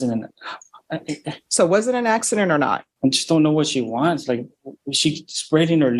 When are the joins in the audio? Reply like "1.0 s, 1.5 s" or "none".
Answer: 2.9 s